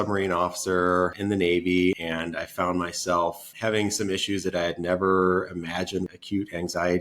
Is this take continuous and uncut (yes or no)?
no